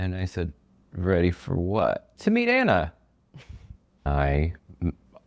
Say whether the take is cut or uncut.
cut